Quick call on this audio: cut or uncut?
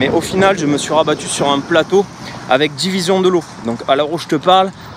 uncut